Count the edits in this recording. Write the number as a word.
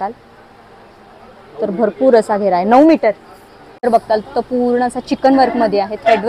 one